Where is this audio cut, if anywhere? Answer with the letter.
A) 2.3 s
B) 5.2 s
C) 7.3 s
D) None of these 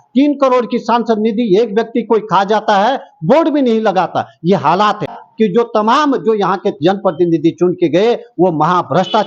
B